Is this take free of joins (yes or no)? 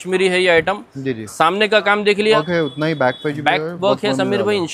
no